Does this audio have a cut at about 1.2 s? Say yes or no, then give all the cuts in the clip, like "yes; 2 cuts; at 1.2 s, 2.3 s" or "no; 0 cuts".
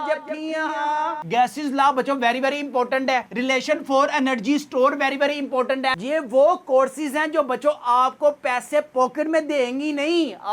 yes; 2 cuts; at 1.2 s, 6.0 s